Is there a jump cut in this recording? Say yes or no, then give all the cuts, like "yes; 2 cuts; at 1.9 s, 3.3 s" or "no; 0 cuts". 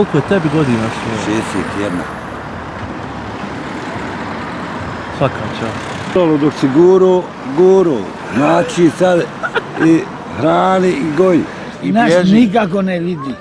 yes; 2 cuts; at 6.2 s, 11.7 s